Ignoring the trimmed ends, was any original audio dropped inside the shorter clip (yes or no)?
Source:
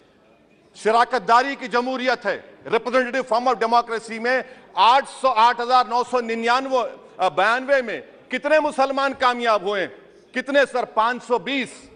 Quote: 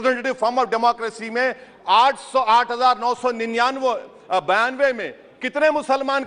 no